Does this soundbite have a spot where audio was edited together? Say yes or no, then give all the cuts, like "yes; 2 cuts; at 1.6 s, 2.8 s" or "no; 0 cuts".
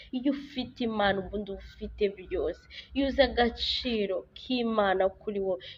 no; 0 cuts